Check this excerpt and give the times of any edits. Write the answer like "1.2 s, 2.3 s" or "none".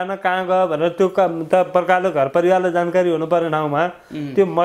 none